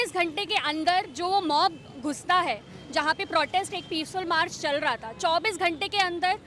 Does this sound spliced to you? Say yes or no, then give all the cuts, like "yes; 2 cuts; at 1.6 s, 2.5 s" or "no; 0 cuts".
no; 0 cuts